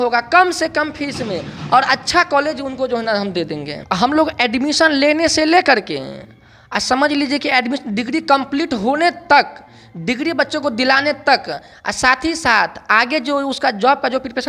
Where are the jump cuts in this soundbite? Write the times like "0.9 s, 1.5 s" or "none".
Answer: 3.8 s